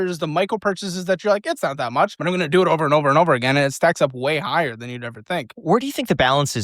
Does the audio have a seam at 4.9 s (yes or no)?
no